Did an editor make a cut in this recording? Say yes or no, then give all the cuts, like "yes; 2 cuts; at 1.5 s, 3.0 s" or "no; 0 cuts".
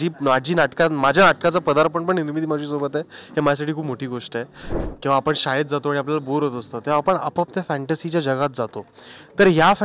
yes; 1 cut; at 4.7 s